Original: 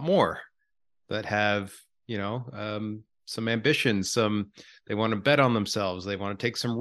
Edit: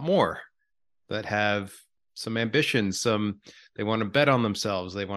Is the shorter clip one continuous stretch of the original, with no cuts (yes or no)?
no